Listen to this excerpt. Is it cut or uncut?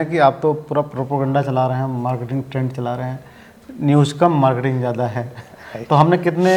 uncut